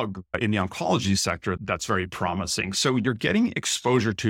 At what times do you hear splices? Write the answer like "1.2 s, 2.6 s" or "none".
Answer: 1.6 s